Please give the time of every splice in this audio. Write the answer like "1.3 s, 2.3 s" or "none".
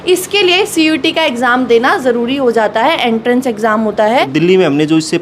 4.3 s